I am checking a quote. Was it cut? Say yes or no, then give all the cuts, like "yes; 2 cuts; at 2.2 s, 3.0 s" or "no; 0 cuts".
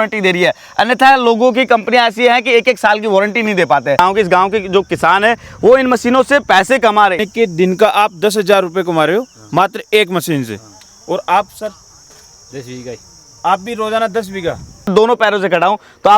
yes; 3 cuts; at 4.0 s, 7.2 s, 14.9 s